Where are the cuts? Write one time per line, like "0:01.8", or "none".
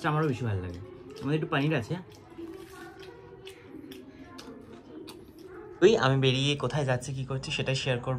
0:05.8